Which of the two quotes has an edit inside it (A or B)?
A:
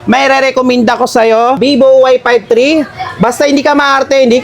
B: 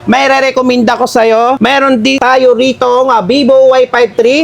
A